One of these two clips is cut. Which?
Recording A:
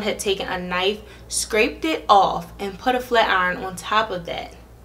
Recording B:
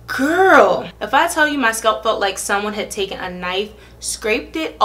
B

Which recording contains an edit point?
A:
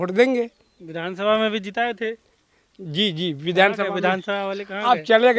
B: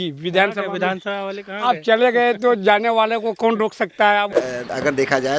B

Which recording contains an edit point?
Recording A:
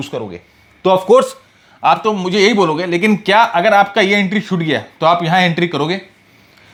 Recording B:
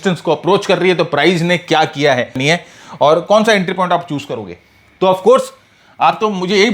B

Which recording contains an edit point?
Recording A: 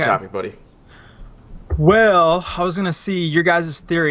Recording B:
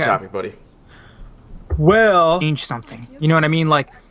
A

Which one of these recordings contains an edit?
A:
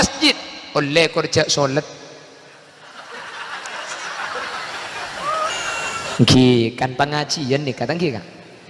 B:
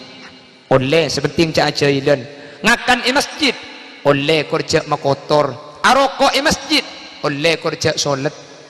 A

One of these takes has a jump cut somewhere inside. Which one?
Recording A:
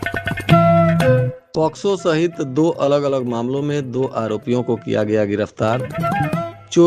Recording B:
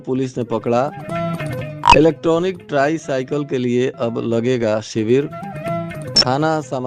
A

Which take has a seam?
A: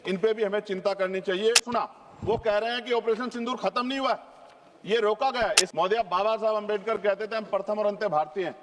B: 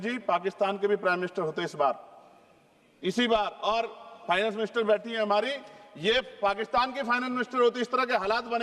A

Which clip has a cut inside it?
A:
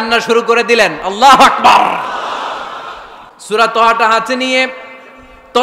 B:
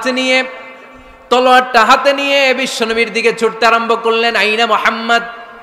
A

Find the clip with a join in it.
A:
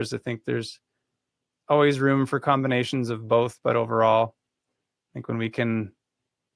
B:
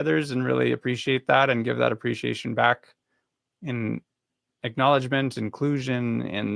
A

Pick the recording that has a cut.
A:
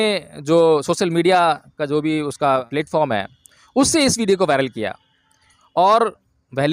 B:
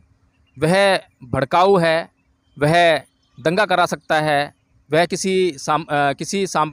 A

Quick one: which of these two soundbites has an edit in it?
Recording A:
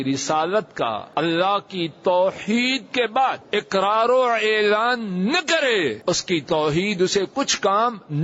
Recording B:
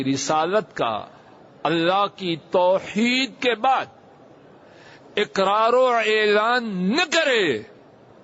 A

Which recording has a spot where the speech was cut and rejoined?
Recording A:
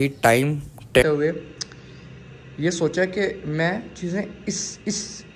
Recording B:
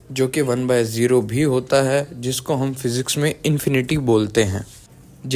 A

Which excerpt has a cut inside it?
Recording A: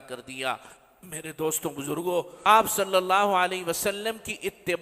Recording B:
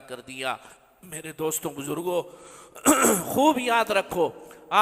A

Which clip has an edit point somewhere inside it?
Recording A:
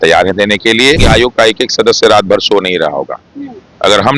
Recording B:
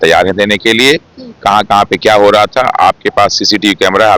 A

